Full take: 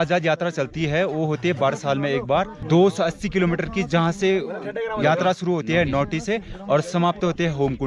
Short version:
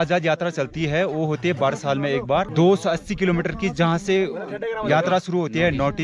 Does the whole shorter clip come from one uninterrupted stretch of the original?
no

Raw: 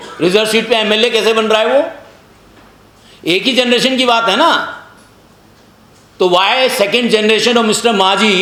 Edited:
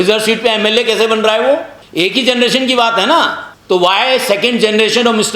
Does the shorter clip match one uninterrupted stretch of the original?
no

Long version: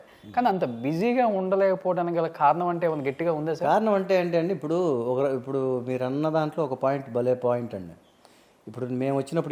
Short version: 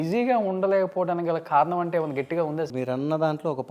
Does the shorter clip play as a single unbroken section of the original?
no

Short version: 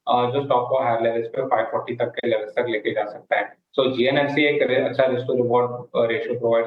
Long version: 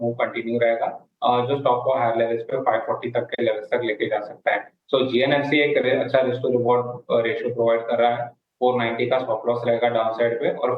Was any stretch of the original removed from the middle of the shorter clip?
no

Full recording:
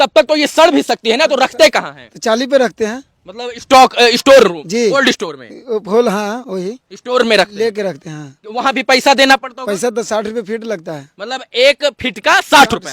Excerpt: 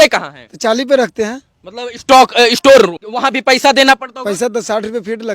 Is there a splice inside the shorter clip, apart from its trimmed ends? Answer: yes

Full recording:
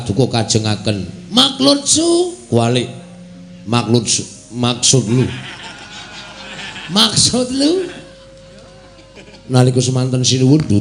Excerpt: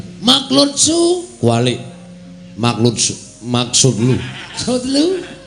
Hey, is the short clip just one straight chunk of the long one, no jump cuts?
no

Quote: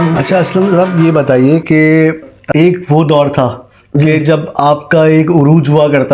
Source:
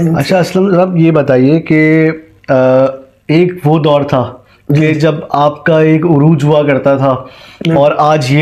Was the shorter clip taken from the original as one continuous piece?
no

